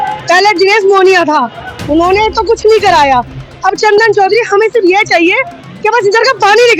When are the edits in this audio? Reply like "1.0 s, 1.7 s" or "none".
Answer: none